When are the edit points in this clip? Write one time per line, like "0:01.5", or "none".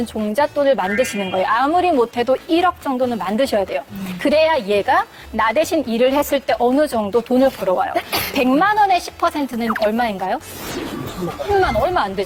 none